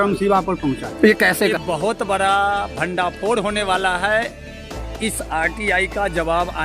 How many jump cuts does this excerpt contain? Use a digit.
1